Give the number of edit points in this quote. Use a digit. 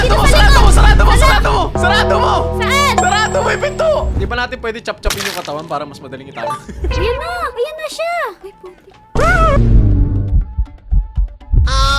2